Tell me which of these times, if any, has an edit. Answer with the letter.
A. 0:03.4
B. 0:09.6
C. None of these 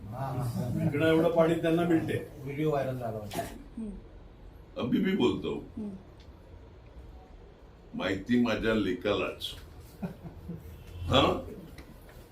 A